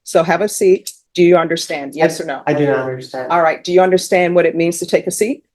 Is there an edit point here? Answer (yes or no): yes